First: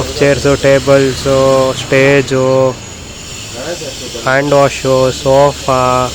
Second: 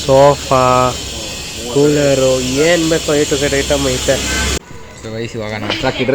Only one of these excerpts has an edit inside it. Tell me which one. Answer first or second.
second